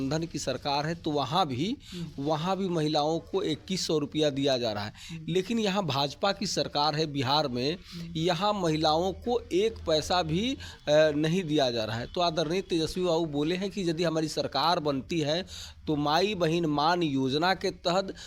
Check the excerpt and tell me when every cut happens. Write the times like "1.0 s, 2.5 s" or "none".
none